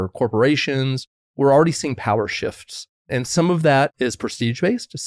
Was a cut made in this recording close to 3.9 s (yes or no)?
yes